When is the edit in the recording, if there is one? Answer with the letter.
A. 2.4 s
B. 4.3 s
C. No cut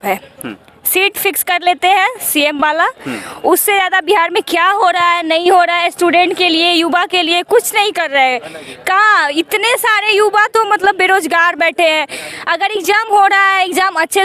C